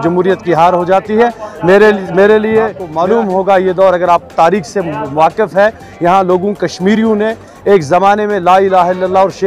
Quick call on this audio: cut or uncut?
cut